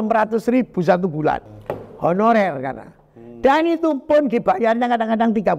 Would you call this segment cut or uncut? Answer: cut